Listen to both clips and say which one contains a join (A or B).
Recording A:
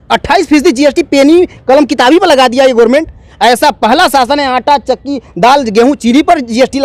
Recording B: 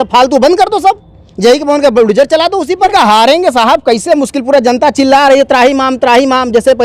B